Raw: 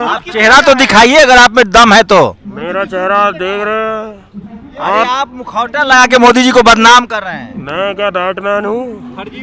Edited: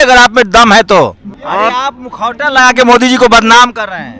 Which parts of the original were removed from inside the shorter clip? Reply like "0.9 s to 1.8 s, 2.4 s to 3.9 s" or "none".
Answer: 2.5 s to 4.6 s